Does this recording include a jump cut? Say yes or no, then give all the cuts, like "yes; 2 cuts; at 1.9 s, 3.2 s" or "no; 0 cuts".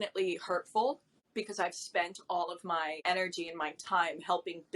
yes; 2 cuts; at 1.1 s, 3.0 s